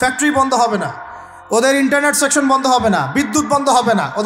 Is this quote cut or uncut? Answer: uncut